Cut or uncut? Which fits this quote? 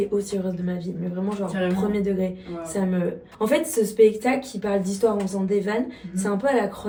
uncut